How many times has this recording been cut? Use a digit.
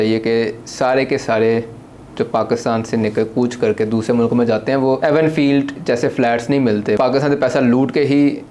2